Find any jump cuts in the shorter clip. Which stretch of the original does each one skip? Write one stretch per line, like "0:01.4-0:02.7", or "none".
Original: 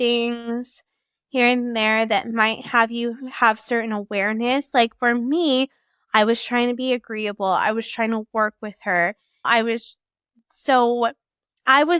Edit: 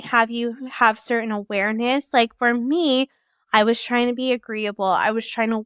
none